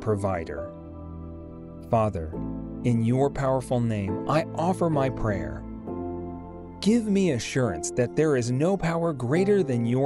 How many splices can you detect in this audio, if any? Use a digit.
2